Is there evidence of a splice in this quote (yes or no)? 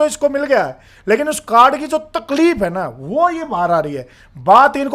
no